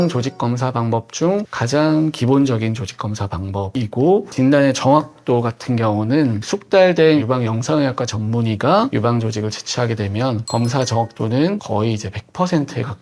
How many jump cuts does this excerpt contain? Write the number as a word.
one